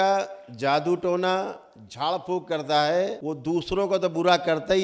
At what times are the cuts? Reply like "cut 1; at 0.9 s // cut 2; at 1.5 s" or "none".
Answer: cut 1; at 3.2 s